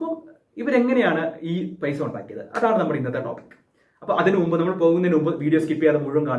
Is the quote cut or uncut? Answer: uncut